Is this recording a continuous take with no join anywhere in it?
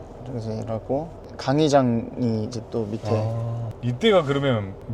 no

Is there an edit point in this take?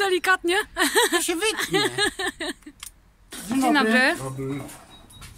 yes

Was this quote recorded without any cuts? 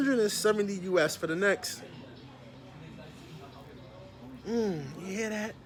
yes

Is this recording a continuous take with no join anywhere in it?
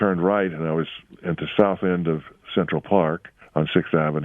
no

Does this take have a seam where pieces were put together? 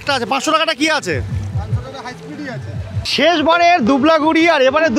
yes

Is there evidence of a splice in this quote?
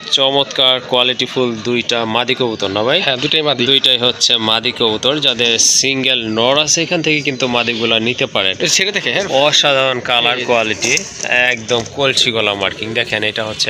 no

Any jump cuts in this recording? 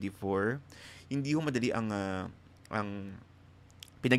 no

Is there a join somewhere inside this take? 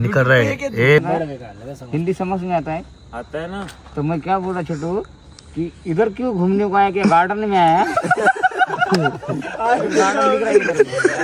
yes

